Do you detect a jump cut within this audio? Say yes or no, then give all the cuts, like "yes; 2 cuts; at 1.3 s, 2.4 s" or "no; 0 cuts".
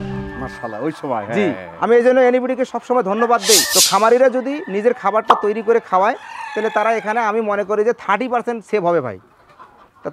yes; 1 cut; at 3.7 s